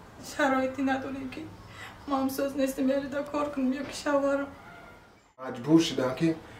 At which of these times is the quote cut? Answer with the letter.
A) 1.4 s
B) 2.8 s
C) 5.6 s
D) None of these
C